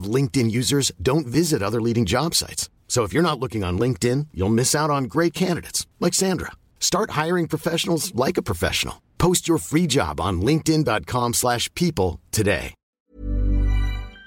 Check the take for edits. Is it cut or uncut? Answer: cut